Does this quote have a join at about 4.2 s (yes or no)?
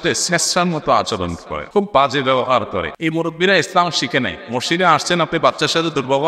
no